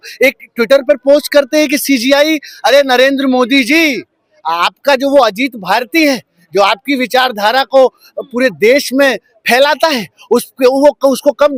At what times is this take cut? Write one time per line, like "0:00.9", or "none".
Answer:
none